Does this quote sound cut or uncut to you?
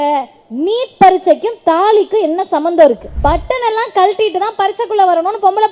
cut